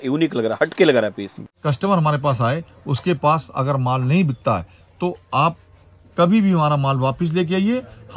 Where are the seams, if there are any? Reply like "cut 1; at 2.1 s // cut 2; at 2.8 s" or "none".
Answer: cut 1; at 1.4 s